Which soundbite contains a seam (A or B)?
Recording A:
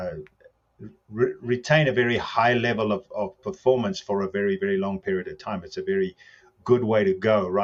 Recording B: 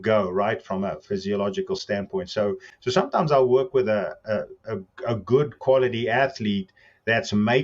B